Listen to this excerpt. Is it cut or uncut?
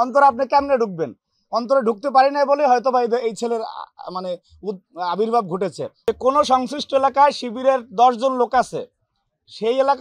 cut